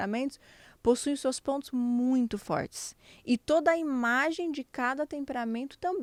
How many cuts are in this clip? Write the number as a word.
zero